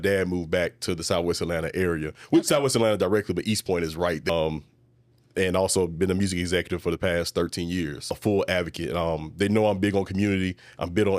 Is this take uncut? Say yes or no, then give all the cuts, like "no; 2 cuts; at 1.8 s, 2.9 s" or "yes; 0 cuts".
no; 2 cuts; at 4.3 s, 8.1 s